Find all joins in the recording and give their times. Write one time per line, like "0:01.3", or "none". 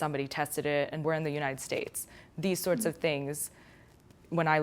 0:01.0